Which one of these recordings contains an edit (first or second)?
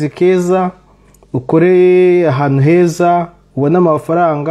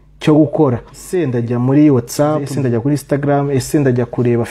second